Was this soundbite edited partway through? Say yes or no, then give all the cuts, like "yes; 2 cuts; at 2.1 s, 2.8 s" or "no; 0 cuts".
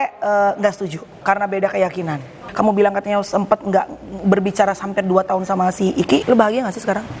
yes; 3 cuts; at 1.2 s, 2.4 s, 6.2 s